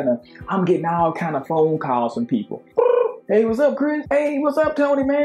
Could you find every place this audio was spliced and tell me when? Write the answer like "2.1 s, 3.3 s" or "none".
2.7 s